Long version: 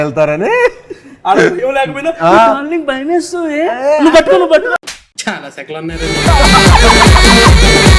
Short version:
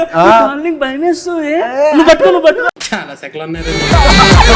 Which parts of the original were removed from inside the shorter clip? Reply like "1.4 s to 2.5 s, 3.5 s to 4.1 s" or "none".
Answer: 4.9 s to 5.2 s